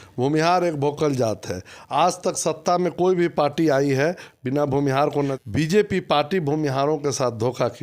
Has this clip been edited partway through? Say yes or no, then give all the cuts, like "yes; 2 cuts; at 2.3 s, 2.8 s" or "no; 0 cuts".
yes; 1 cut; at 5.3 s